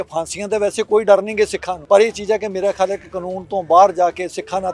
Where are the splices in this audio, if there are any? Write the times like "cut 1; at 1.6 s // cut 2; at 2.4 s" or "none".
cut 1; at 1.7 s